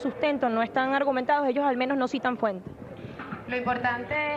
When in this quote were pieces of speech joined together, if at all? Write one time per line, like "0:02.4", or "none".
none